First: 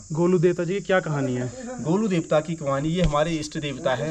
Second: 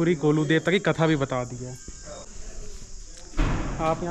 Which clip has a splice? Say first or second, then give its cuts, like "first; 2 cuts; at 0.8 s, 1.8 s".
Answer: second; 1 cut; at 2.3 s